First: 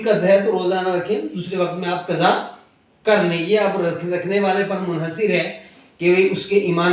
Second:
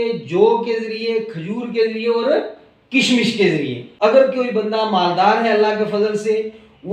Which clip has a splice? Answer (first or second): second